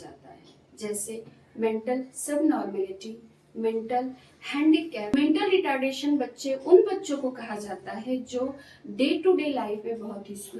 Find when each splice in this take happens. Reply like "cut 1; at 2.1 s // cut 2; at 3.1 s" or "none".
cut 1; at 5.1 s